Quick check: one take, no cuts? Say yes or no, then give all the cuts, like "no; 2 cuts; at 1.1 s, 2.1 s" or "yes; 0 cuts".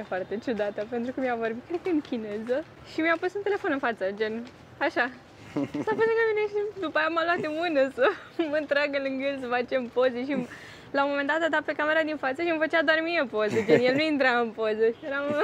yes; 0 cuts